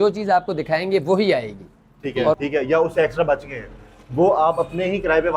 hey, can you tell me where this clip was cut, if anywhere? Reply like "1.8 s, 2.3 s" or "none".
2.4 s